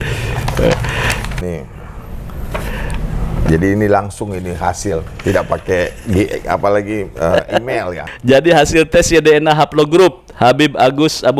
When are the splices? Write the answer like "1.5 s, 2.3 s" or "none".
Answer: 1.4 s, 8.0 s